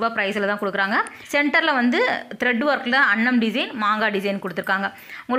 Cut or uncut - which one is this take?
cut